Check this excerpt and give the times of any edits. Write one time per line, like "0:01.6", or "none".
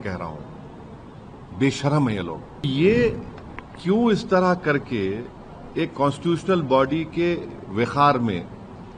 0:02.7